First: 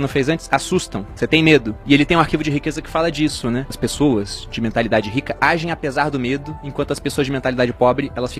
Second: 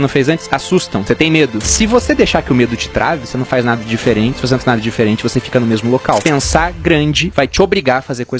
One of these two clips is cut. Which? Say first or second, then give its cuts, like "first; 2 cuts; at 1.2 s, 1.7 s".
second; 2 cuts; at 1.2 s, 6.2 s